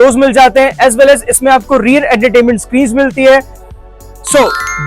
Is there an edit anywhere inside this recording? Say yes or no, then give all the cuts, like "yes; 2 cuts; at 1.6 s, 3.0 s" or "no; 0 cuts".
yes; 1 cut; at 3.6 s